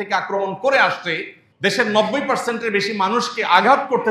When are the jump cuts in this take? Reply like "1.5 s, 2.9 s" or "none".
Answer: 1.4 s